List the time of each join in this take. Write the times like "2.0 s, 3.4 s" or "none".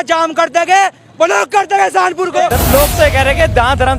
2.5 s